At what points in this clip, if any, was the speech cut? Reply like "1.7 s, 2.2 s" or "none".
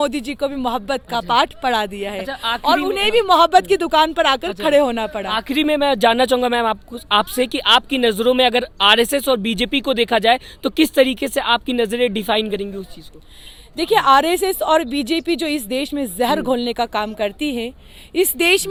none